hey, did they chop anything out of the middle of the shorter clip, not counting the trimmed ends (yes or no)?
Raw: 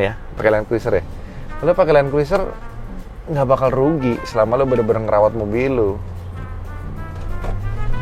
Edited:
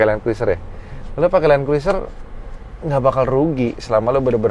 no